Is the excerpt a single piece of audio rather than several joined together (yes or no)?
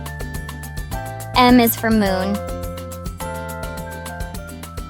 no